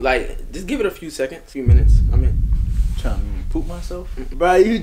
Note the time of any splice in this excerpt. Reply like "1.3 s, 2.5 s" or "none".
none